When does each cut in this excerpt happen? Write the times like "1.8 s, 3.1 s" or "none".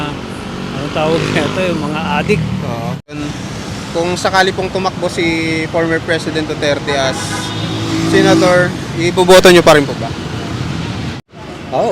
3.2 s, 11.2 s